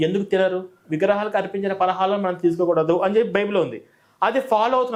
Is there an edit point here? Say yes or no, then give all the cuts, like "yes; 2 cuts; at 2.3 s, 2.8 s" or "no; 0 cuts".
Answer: no; 0 cuts